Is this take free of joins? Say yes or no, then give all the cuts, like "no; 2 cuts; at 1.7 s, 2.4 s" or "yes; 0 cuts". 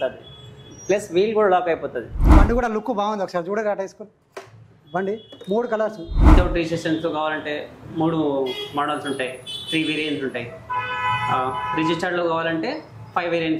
no; 2 cuts; at 2.3 s, 6.2 s